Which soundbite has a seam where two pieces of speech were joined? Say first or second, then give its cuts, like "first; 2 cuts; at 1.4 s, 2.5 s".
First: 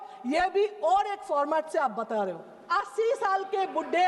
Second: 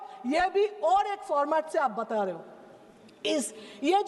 first; 1 cut; at 2.6 s